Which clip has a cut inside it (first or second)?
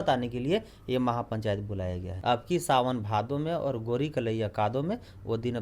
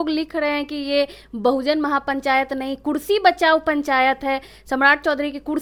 first